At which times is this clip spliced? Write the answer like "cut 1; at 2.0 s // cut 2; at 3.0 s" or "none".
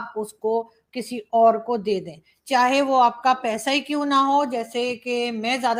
none